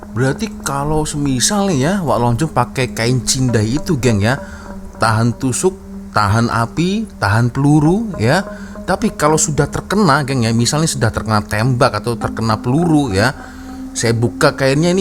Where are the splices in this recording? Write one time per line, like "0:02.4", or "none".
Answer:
none